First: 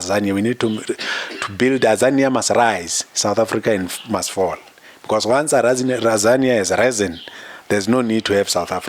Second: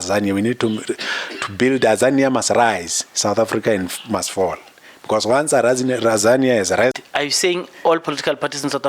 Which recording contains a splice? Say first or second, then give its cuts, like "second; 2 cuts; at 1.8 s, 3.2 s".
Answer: second; 1 cut; at 7.0 s